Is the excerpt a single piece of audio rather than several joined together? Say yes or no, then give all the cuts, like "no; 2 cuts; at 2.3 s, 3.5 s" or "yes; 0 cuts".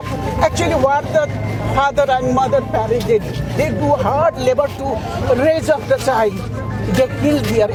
yes; 0 cuts